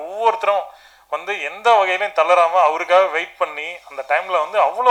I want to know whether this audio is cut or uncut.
uncut